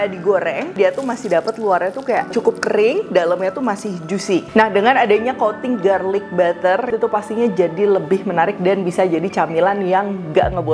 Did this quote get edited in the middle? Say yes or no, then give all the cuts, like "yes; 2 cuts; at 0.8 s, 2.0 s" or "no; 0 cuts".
yes; 4 cuts; at 0.7 s, 2.3 s, 4.5 s, 6.9 s